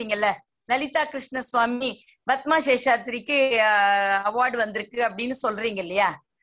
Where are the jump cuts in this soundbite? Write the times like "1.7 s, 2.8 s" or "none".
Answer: none